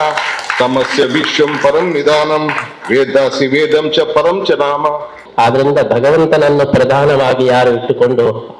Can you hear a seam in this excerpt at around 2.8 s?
no; 1 cut; at 5.2 s

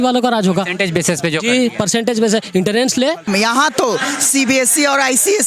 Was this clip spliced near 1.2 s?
no; 1 cut; at 3.3 s

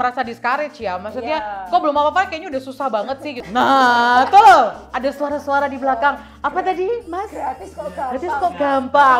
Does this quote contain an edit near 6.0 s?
no; 1 cut; at 3.4 s

